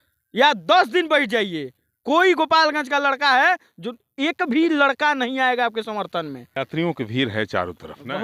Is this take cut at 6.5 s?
yes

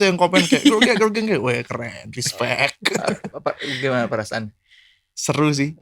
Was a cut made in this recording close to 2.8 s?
no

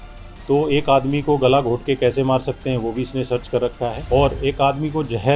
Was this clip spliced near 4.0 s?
yes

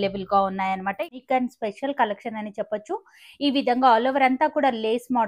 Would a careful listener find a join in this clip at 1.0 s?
yes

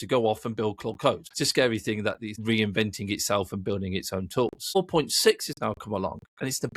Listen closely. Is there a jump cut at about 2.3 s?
yes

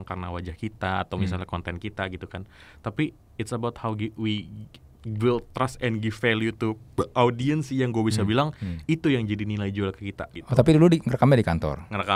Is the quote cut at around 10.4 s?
yes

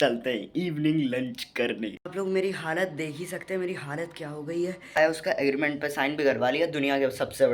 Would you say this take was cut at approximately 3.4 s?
no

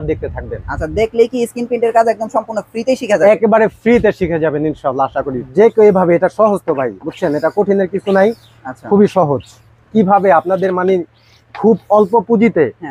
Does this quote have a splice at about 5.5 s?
yes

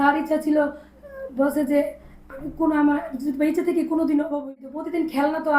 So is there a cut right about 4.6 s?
yes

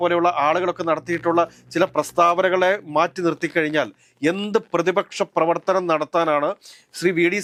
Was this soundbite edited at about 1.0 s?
no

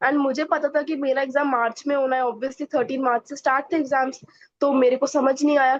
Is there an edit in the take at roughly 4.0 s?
no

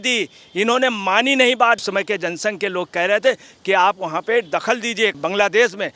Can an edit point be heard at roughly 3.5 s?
no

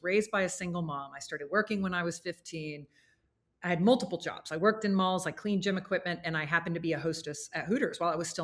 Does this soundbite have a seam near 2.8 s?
no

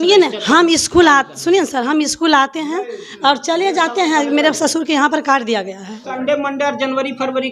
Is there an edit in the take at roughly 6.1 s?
yes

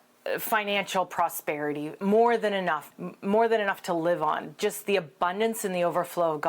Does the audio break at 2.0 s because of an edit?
yes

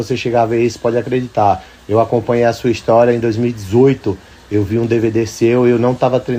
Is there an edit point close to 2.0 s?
no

